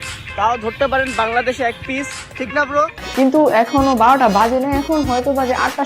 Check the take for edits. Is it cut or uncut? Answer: cut